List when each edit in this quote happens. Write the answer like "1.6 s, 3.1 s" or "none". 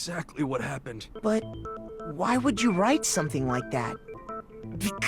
1.1 s, 4.2 s